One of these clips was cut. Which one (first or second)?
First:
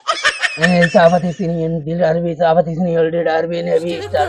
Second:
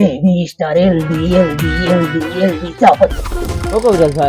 second